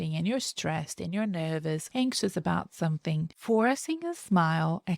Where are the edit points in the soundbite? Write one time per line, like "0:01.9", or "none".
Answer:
0:01.8
0:03.3